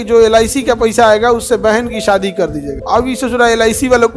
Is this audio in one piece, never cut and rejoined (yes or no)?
no